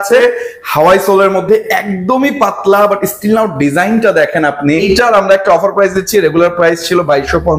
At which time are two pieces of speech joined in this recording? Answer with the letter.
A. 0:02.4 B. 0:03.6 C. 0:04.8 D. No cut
C